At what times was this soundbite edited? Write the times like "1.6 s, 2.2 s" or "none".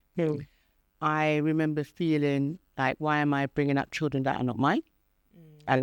none